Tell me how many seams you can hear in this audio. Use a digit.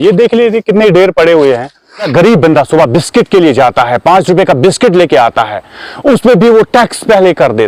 1